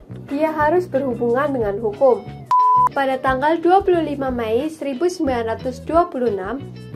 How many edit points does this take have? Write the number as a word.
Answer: one